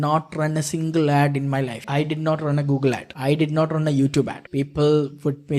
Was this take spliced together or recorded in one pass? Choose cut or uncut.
cut